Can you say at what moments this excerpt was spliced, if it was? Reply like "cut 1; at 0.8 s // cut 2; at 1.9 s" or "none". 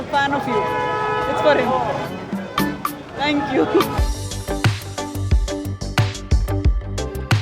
cut 1; at 4.0 s